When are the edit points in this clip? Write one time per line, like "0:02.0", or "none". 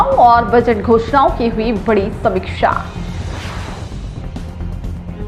none